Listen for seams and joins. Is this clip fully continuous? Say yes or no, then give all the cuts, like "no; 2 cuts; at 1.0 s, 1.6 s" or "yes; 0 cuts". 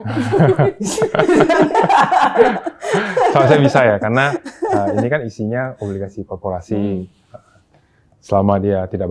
yes; 0 cuts